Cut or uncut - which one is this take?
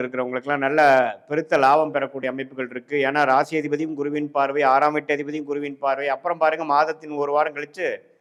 uncut